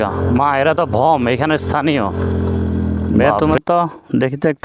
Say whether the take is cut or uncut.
cut